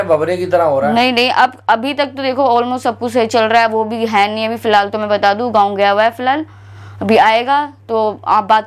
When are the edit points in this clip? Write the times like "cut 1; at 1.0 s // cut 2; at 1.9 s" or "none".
none